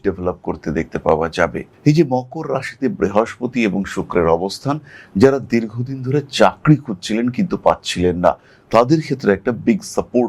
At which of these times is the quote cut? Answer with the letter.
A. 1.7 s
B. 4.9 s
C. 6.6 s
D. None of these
A